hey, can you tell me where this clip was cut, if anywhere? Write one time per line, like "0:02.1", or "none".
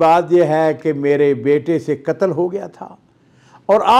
none